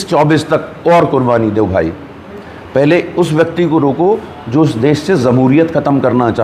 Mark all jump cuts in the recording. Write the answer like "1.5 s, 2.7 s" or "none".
none

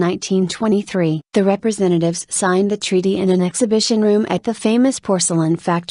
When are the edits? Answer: 4.0 s

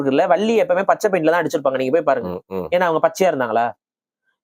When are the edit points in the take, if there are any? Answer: none

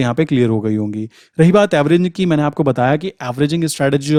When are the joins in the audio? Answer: none

